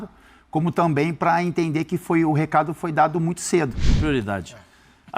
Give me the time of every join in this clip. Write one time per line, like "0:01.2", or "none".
0:04.0

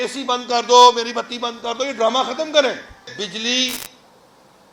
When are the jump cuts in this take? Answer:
0:03.1

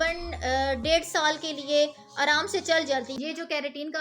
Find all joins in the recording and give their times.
0:03.1

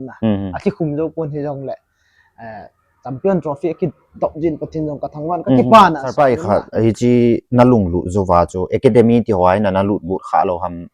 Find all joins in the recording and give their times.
0:06.2

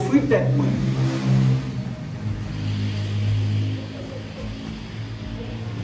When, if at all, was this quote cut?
none

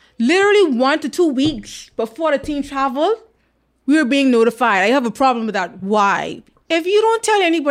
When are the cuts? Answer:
0:06.4

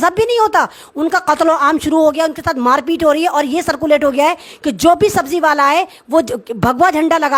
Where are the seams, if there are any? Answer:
none

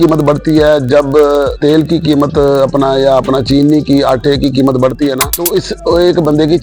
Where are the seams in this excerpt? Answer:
0:01.5
0:05.3

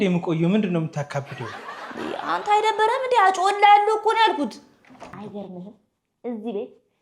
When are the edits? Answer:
0:05.1

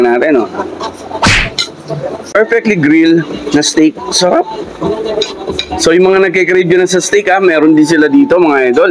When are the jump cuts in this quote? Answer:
0:02.4

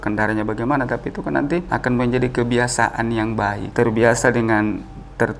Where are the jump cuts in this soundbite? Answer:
0:01.7
0:03.7

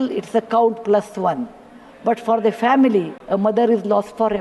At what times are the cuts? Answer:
0:03.2

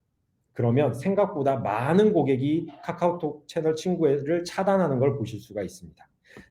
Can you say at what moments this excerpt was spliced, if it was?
none

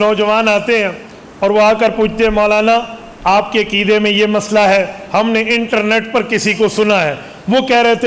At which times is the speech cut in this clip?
none

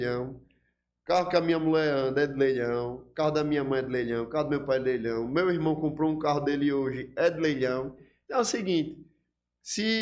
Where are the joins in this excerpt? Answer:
none

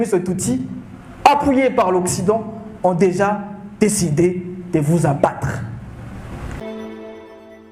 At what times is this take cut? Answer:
0:06.6

